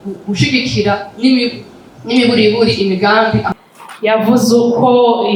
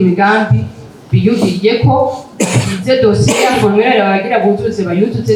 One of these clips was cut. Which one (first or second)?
first